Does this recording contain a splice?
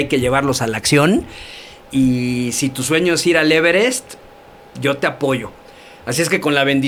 no; 0 cuts

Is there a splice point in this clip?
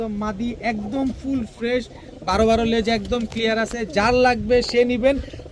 no; 0 cuts

